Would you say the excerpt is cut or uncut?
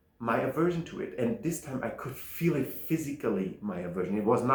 uncut